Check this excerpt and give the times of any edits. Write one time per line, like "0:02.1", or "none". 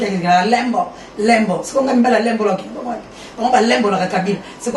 none